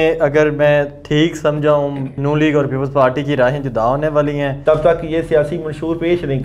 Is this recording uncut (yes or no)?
no